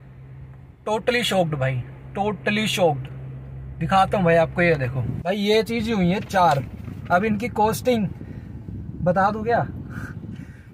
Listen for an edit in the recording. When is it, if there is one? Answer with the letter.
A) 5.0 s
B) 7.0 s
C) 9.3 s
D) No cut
A